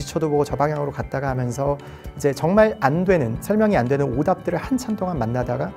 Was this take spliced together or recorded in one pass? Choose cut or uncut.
uncut